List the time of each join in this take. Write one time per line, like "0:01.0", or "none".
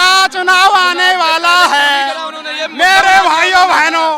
none